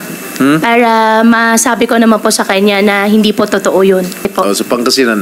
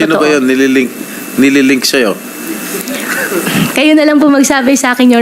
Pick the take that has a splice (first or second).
first